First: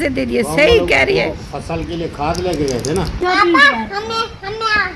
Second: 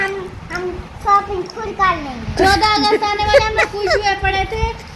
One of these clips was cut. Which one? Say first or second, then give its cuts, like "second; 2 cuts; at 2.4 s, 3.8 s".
first; 1 cut; at 3.2 s